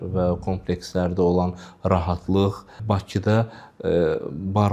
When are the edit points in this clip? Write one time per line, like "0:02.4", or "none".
none